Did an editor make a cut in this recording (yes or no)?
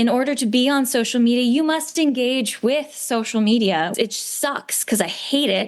yes